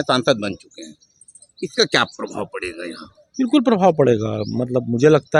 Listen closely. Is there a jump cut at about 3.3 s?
no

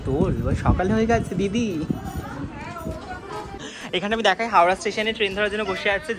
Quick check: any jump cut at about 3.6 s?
yes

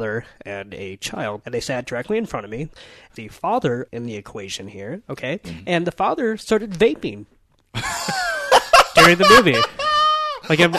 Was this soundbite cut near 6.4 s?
no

